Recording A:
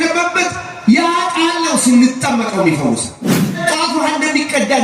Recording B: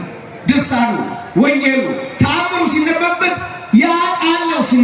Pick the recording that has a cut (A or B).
A